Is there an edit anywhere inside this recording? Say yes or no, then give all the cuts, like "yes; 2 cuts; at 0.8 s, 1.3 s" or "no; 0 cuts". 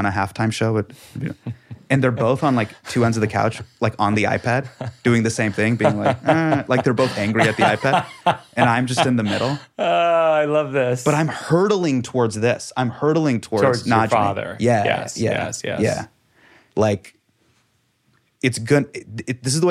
yes; 1 cut; at 16.6 s